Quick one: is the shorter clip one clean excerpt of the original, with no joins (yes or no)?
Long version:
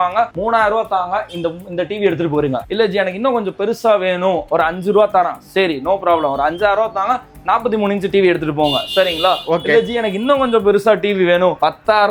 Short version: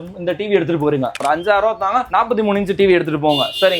no